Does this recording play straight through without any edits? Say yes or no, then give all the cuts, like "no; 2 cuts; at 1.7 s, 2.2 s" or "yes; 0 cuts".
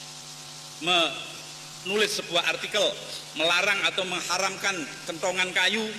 yes; 0 cuts